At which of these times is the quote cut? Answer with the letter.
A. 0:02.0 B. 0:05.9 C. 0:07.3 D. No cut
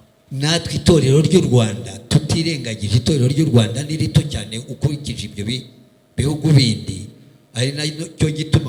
D